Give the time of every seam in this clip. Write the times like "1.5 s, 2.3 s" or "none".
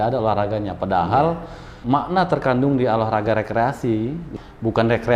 1.7 s, 4.2 s